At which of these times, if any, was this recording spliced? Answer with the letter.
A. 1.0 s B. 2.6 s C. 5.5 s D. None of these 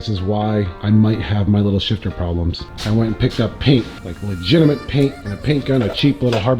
B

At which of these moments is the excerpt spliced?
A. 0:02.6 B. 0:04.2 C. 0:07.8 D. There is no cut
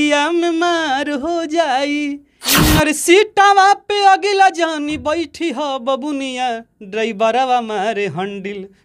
A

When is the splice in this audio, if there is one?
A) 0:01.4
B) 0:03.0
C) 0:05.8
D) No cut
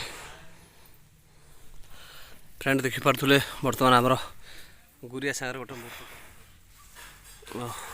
C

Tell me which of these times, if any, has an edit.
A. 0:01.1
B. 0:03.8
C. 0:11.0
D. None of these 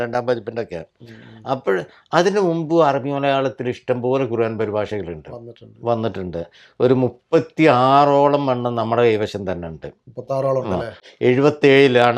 C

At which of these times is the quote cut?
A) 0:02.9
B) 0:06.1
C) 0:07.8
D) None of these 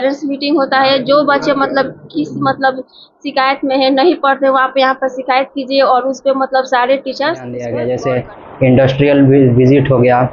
C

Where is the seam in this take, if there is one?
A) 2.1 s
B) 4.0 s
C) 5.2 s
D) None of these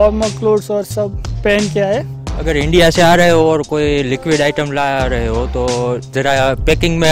D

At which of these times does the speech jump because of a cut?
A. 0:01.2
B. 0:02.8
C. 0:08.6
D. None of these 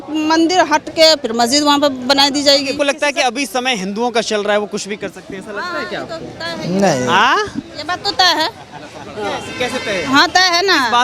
B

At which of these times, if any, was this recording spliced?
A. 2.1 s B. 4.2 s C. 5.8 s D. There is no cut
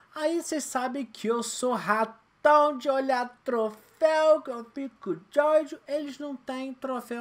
B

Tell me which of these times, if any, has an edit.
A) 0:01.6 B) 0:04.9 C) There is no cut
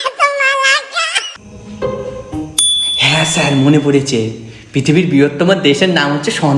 A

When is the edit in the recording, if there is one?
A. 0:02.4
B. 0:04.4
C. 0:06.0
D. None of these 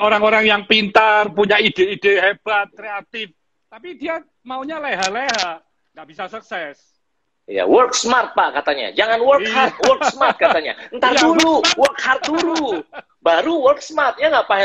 D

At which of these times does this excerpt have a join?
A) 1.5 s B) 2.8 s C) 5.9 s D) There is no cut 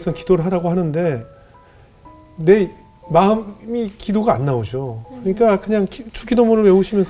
D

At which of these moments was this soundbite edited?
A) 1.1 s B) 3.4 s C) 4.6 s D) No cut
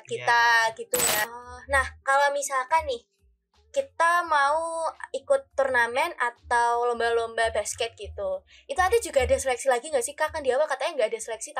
A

